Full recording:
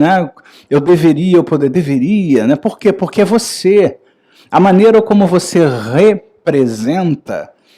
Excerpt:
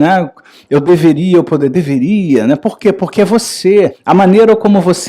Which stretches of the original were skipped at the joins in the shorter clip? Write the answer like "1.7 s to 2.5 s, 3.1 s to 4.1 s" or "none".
4.0 s to 4.4 s